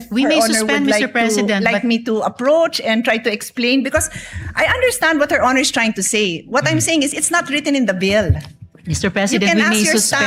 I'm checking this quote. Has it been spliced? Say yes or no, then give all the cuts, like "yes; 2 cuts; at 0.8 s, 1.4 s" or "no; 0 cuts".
no; 0 cuts